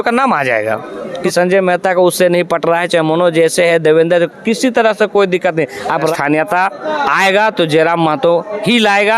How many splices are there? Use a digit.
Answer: 2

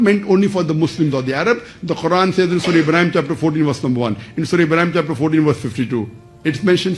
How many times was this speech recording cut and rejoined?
0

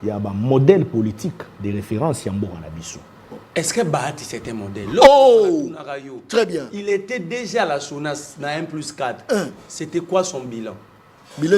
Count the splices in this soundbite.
1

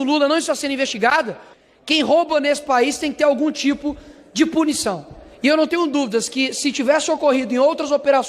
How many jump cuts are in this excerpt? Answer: 1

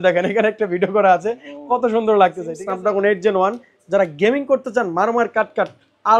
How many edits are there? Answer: 1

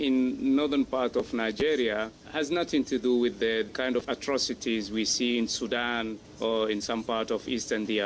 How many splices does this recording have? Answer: 3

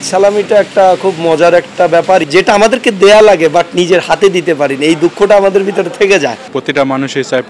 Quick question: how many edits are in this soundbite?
2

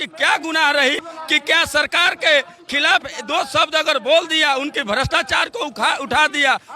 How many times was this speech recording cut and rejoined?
1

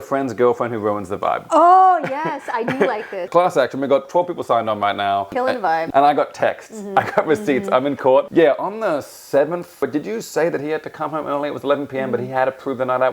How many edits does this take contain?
4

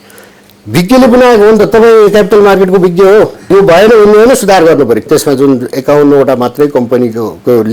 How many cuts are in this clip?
1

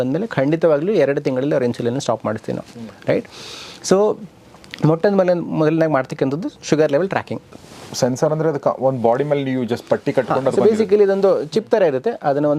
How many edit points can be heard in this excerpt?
1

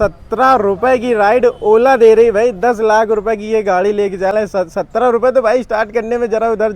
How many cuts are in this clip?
0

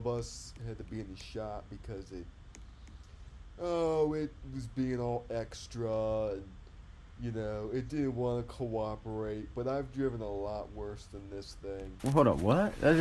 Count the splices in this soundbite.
1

